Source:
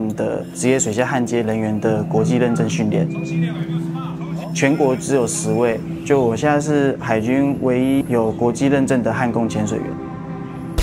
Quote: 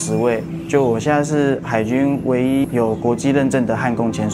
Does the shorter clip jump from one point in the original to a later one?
no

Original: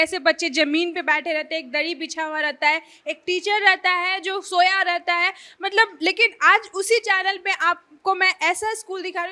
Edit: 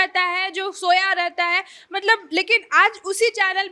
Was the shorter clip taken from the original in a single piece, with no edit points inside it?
yes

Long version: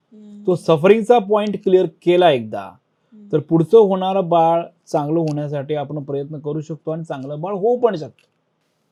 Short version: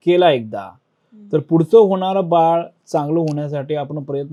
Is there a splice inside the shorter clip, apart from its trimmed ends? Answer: no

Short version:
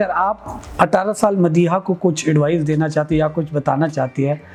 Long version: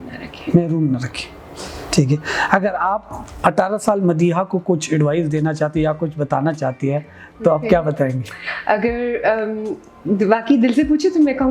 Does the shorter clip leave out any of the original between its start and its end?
no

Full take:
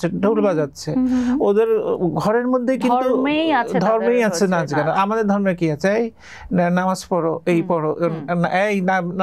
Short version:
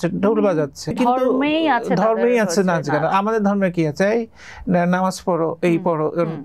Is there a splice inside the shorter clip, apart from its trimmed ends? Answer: yes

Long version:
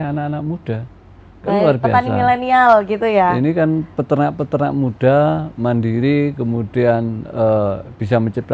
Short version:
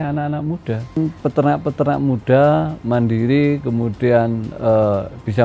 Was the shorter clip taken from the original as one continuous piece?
no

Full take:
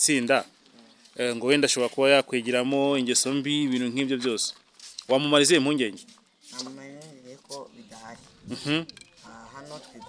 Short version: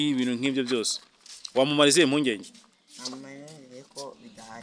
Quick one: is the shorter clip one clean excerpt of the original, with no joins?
yes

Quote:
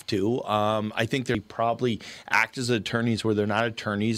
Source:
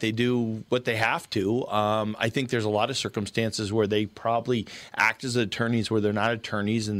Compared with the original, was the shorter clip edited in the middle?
yes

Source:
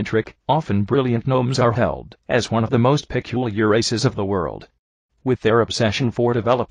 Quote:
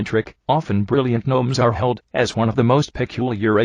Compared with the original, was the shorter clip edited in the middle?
yes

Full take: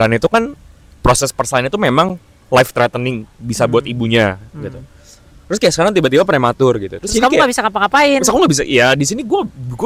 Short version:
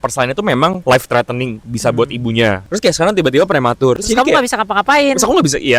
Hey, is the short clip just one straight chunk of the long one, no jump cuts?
no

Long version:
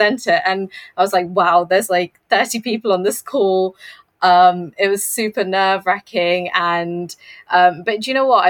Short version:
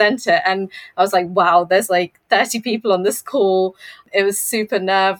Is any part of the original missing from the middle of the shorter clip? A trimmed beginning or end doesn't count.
yes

